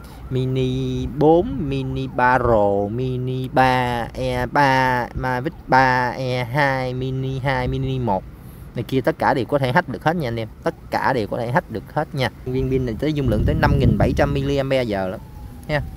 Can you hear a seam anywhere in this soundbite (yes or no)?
yes